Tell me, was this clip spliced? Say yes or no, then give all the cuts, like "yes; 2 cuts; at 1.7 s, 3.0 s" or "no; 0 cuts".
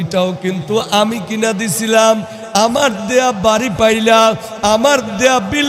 no; 0 cuts